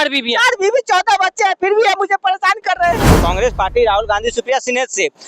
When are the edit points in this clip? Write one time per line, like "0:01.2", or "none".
0:03.2